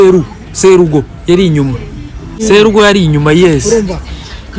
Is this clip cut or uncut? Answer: cut